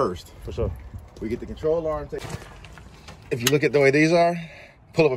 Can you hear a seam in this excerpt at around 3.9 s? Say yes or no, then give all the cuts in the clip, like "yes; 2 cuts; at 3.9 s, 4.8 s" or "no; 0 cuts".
no; 1 cut; at 2.1 s